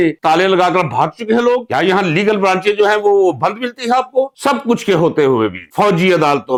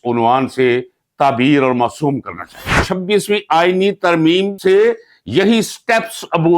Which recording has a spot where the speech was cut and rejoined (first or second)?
second